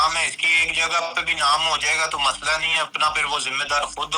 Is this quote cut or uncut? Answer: uncut